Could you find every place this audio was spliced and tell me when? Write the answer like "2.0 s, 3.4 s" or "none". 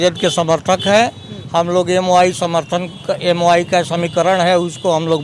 none

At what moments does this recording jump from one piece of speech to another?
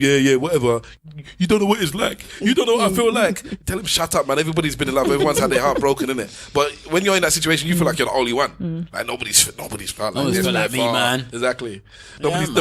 0.9 s

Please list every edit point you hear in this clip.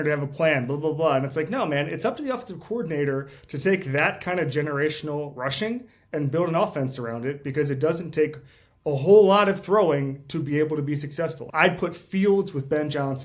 11.4 s

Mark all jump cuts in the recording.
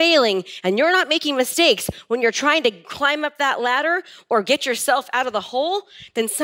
none

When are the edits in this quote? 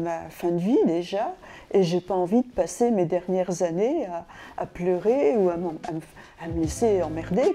none

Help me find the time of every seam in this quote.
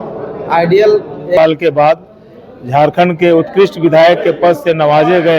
1.4 s

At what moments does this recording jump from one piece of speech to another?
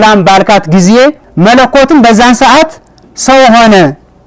1.2 s

